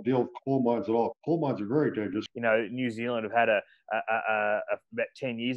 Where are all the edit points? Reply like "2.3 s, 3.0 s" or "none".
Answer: 2.3 s